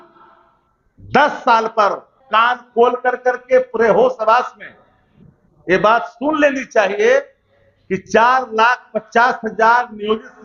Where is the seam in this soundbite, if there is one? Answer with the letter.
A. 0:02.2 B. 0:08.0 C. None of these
A